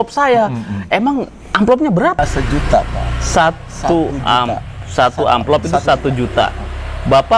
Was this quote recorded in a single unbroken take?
no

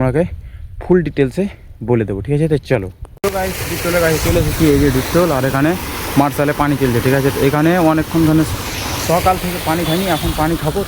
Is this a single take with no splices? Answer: yes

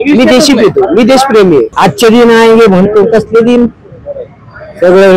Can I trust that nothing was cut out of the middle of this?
no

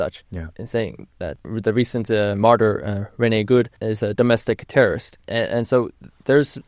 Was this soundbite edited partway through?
yes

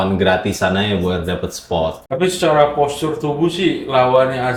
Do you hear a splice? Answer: no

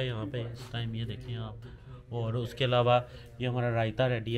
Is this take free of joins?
yes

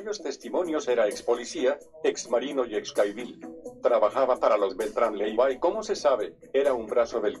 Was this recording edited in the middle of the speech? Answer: no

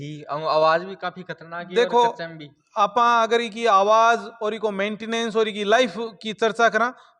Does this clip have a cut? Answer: no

